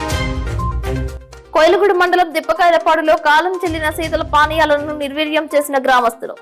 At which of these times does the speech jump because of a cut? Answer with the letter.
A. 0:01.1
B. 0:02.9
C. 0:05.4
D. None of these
A